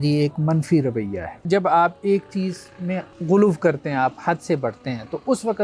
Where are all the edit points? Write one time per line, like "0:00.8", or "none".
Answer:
0:01.4
0:03.1